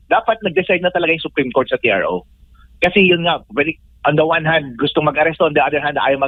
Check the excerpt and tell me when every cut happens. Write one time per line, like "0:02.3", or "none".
none